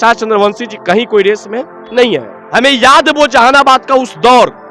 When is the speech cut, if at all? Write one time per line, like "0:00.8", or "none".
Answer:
0:02.4